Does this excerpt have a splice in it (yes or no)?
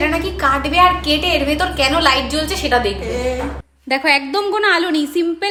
no